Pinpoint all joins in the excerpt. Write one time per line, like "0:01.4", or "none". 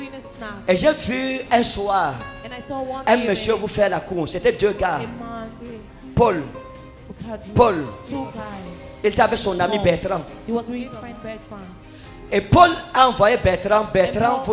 none